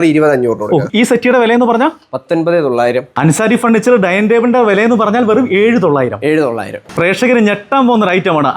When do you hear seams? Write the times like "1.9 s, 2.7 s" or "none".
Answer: 0.9 s, 3.1 s, 6.8 s